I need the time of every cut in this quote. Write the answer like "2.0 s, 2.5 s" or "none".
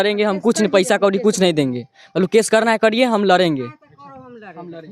none